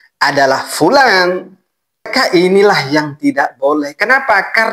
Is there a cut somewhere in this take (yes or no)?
yes